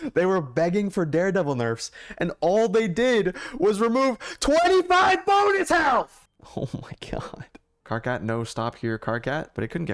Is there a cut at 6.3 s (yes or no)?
no